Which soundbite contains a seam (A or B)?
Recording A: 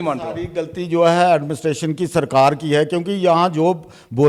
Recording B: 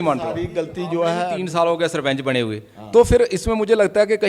B